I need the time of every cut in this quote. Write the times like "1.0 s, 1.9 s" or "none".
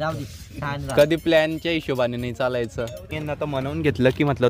3.1 s